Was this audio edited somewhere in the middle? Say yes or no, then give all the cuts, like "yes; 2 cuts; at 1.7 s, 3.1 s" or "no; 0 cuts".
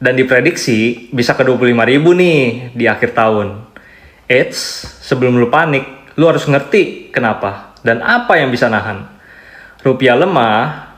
no; 0 cuts